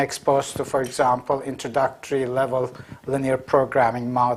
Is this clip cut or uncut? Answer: cut